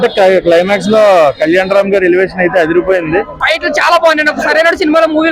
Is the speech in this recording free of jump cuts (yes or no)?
no